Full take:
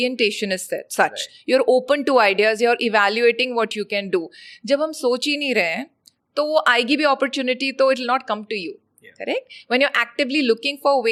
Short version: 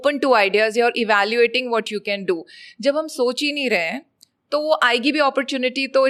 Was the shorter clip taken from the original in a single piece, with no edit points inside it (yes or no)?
yes